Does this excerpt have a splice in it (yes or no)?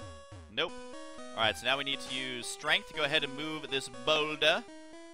yes